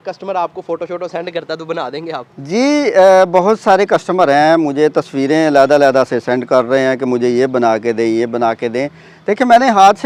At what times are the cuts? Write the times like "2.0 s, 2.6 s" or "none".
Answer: none